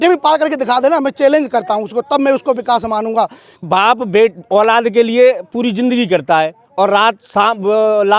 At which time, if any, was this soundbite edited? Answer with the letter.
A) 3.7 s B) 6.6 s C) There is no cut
A